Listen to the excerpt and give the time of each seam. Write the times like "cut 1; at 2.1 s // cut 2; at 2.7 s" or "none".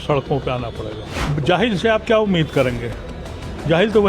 cut 1; at 1.2 s